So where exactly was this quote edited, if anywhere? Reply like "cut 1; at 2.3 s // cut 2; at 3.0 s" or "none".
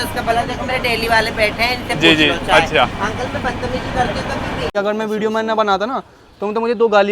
cut 1; at 4.8 s